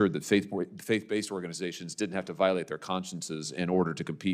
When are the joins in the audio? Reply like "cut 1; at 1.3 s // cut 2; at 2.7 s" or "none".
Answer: none